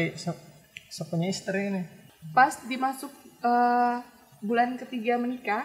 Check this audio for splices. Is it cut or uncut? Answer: cut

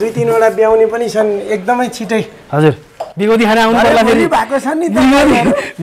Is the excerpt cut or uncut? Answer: uncut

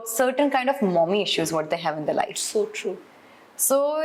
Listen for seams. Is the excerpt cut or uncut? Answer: uncut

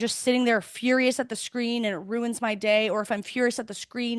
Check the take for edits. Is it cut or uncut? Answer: uncut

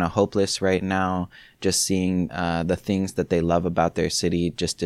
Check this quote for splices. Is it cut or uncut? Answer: cut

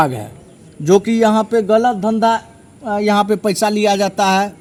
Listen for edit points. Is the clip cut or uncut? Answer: uncut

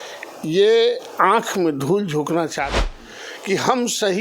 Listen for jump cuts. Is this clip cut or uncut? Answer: cut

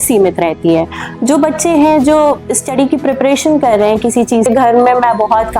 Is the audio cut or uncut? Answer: cut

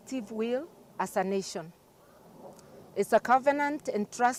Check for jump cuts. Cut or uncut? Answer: uncut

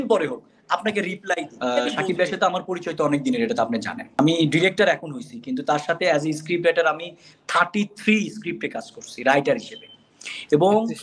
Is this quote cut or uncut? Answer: cut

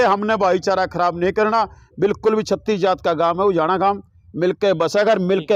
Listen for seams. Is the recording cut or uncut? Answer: uncut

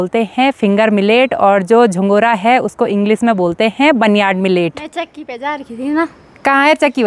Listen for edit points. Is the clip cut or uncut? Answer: cut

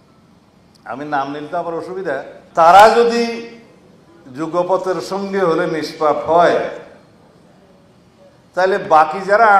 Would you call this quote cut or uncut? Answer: cut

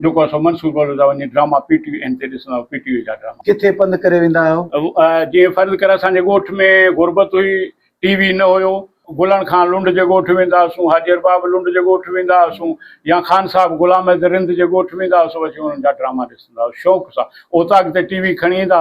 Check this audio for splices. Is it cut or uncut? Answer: cut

